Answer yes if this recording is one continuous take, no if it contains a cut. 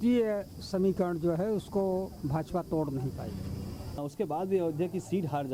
no